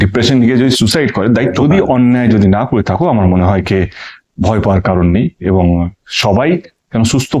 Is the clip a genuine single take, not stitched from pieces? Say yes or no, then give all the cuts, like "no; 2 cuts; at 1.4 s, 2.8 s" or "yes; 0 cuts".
no; 1 cut; at 1.6 s